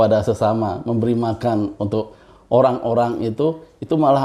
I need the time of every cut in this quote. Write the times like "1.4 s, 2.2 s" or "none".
none